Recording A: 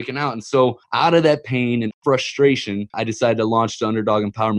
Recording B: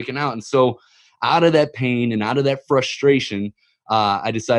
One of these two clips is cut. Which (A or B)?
A